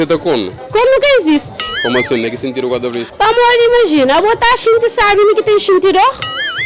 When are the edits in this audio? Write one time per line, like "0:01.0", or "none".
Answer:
none